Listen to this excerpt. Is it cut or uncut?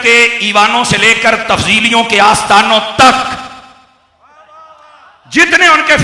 uncut